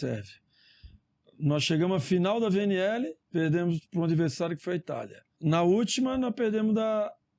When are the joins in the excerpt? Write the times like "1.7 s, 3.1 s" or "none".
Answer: 3.2 s, 5.3 s